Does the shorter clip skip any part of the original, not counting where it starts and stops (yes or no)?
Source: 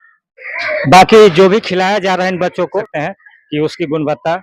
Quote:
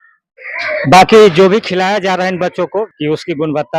yes